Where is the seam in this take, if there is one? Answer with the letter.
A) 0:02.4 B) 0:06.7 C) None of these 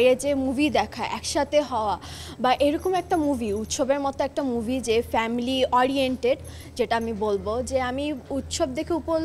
C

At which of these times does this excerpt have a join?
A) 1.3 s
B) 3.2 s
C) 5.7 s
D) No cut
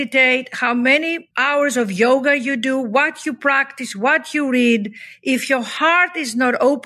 A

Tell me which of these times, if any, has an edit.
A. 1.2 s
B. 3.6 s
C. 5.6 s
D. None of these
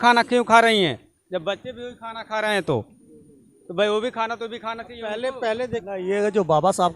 C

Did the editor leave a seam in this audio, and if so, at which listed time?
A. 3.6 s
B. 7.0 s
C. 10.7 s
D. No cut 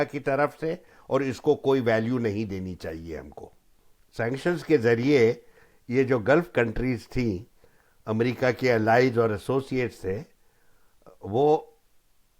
A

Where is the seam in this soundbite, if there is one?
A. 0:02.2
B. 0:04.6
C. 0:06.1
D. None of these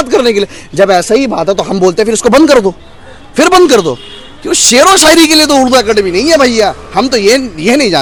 D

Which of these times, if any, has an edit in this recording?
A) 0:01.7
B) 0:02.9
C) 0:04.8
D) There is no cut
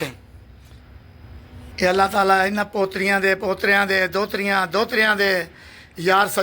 A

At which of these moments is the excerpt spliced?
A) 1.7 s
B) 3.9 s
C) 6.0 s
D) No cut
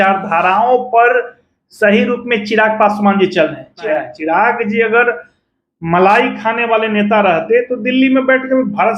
B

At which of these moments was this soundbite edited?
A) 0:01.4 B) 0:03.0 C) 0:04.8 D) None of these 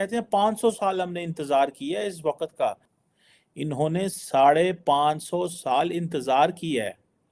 D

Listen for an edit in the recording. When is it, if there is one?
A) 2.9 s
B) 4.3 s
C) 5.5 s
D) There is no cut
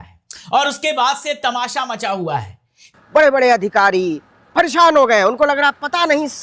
A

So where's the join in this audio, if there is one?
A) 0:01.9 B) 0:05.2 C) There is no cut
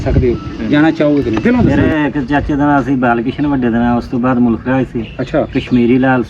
A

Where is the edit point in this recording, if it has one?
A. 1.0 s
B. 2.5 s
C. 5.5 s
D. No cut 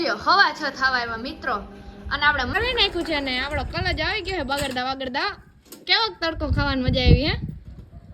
B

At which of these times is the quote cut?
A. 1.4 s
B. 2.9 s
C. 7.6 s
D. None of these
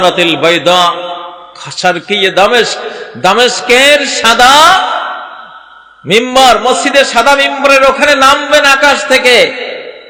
D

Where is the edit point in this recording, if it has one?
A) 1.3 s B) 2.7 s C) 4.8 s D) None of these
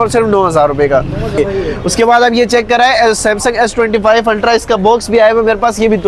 A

